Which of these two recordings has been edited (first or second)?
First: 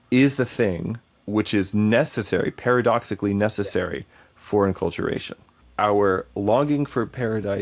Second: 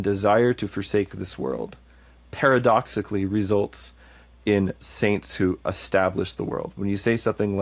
first